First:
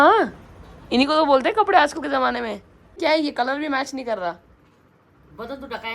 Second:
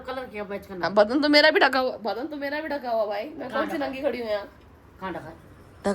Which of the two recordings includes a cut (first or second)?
first